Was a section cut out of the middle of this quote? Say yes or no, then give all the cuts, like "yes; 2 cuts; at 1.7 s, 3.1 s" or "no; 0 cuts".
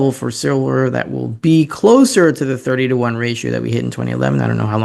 no; 0 cuts